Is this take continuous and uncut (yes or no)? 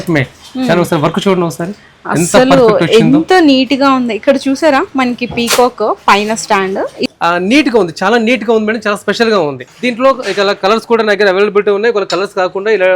no